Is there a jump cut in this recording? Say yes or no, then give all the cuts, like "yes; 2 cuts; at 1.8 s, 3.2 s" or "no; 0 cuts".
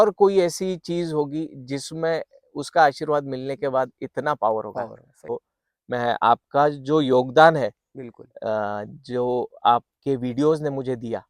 yes; 1 cut; at 5.3 s